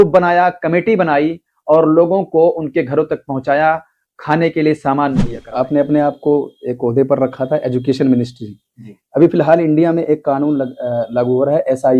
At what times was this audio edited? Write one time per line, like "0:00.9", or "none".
0:05.4